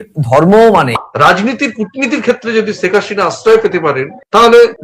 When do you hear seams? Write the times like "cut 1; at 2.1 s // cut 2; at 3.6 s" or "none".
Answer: cut 1; at 1.0 s